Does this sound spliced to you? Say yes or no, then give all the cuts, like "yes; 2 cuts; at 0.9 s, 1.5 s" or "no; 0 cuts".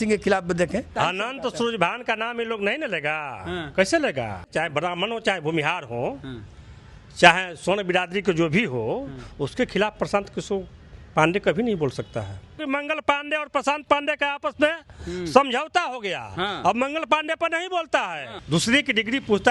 yes; 4 cuts; at 0.9 s, 4.4 s, 12.6 s, 18.3 s